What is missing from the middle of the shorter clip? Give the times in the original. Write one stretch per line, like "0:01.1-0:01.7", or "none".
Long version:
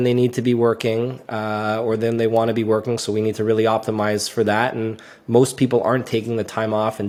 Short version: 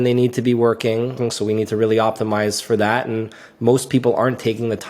0:01.2-0:02.9